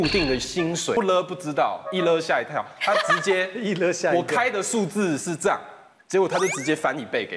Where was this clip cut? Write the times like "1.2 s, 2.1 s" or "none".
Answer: 1.0 s